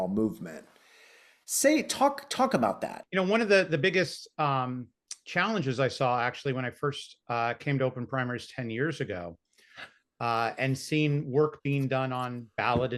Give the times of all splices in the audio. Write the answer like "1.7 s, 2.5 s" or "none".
3.0 s